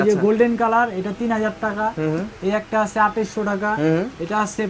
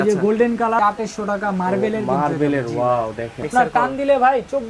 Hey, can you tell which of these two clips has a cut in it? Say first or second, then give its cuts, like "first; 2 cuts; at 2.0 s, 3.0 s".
second; 2 cuts; at 0.8 s, 3.5 s